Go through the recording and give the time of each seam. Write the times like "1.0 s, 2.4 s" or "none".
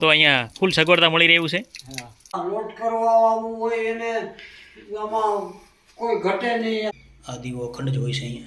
2.4 s, 6.9 s